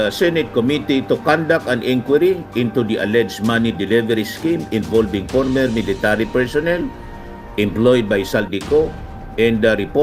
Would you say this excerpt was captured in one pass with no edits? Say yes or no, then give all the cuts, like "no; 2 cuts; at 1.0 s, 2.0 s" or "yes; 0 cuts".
yes; 0 cuts